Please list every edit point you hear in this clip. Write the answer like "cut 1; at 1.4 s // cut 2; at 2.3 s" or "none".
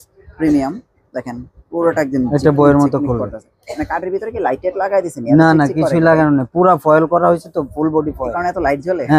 none